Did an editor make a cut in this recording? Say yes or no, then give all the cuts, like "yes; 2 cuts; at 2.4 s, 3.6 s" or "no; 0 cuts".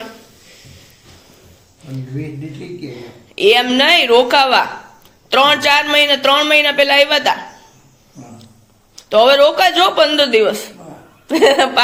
no; 0 cuts